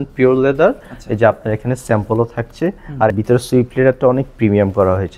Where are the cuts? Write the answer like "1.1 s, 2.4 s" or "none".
3.1 s